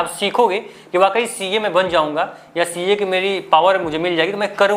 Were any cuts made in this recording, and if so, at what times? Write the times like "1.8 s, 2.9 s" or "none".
none